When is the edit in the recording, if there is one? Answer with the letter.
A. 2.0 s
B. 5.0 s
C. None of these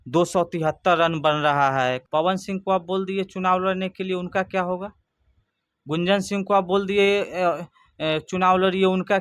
A